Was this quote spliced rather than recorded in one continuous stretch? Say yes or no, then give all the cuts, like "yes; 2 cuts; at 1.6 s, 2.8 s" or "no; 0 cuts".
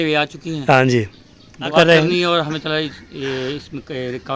yes; 1 cut; at 1.7 s